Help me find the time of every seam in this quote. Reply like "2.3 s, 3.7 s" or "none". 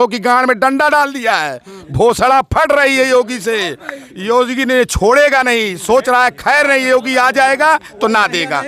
none